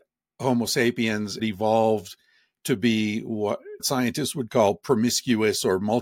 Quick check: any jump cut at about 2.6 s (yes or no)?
no